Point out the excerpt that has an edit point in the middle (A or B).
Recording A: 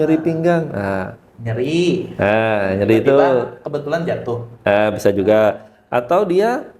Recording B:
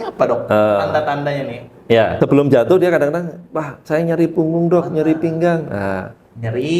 B